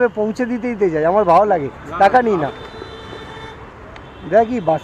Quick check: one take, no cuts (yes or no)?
no